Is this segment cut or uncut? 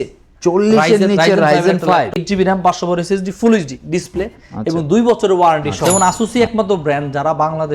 cut